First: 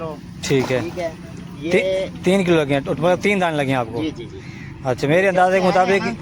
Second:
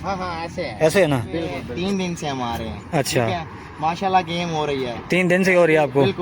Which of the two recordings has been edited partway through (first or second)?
second